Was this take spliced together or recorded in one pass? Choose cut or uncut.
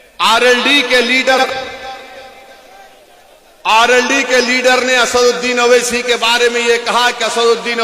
cut